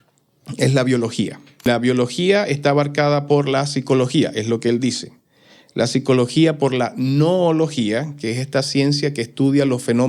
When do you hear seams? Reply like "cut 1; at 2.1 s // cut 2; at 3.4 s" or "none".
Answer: cut 1; at 1.7 s